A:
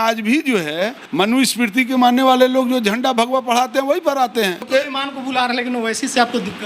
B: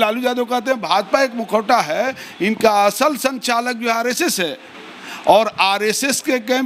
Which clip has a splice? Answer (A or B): A